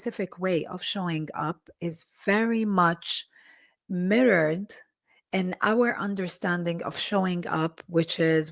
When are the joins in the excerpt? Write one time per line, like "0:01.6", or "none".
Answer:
none